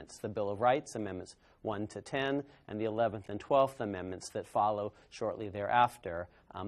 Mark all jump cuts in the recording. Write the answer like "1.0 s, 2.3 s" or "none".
4.7 s